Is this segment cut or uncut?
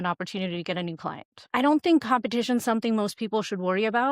cut